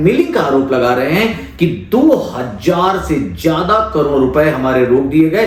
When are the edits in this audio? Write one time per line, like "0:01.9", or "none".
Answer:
none